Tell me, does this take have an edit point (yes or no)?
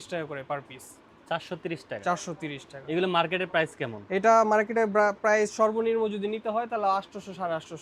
no